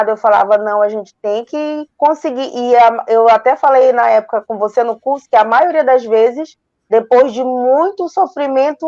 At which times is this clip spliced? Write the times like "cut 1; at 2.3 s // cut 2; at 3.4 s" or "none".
none